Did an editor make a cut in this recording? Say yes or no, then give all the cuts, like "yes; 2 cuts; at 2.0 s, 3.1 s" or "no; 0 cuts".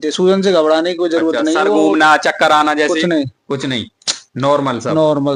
no; 0 cuts